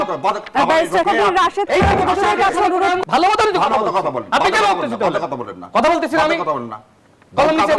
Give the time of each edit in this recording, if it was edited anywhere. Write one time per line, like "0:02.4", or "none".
0:01.0
0:03.0